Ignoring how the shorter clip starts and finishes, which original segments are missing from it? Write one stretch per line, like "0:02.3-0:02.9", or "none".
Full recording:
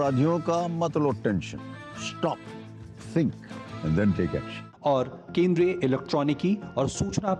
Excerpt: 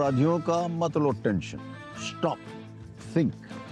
none